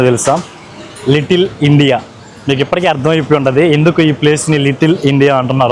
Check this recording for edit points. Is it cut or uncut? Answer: uncut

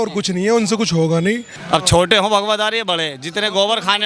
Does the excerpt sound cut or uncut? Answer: cut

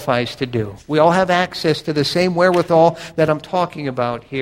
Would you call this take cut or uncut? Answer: uncut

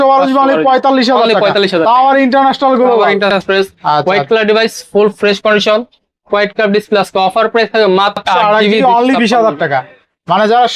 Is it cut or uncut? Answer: cut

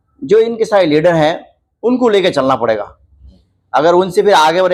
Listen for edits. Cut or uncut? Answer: uncut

